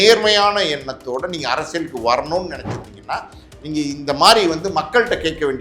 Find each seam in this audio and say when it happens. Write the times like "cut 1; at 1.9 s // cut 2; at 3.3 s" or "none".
none